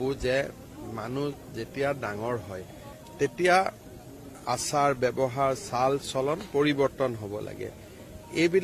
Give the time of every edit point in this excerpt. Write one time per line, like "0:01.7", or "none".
none